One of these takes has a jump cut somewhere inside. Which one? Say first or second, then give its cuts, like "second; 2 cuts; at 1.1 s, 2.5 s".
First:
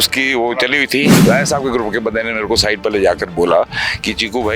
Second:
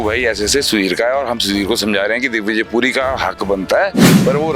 first; 1 cut; at 1.1 s